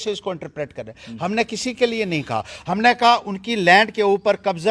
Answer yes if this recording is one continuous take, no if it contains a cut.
yes